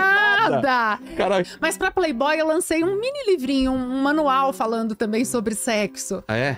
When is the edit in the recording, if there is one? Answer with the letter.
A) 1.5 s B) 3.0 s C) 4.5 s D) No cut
A